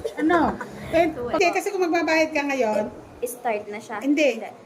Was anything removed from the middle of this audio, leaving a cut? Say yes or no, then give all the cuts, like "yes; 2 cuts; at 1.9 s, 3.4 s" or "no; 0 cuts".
yes; 1 cut; at 1.4 s